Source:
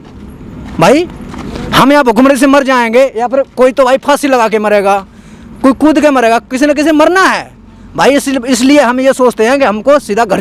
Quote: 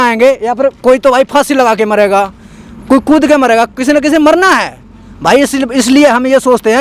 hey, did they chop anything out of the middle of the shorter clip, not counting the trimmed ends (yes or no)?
no